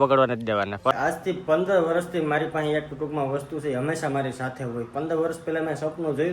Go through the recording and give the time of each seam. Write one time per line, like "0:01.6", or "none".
0:00.9